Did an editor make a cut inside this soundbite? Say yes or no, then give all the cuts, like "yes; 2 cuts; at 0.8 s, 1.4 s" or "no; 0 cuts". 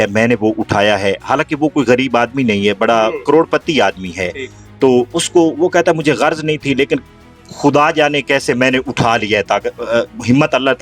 no; 0 cuts